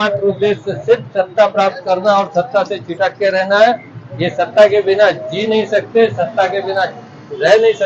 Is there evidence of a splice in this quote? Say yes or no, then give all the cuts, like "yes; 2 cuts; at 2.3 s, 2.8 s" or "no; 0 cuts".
no; 0 cuts